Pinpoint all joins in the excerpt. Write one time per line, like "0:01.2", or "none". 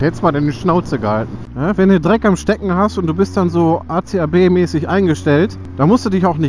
0:01.4